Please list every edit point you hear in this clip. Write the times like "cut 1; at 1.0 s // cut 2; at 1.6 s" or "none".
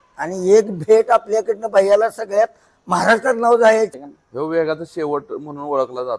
cut 1; at 4.0 s